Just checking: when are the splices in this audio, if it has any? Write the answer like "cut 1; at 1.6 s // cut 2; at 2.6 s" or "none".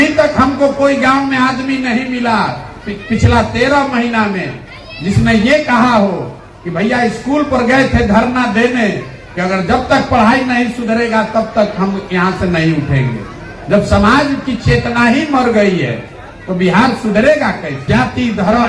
cut 1; at 17.7 s